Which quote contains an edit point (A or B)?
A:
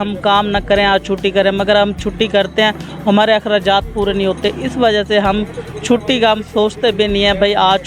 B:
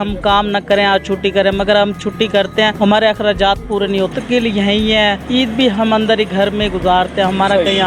B